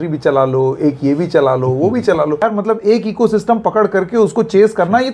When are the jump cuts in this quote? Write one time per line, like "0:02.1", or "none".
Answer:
0:02.4